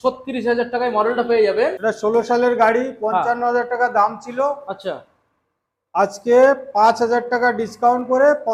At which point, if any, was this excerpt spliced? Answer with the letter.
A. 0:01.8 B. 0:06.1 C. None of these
A